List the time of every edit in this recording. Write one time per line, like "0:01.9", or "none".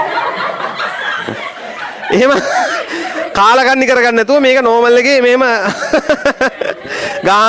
none